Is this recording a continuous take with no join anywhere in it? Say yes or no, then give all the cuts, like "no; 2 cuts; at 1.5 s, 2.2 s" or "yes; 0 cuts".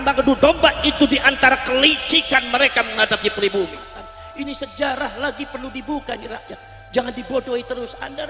no; 1 cut; at 4.2 s